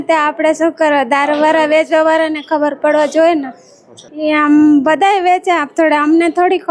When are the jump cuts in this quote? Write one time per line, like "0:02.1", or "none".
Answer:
0:04.1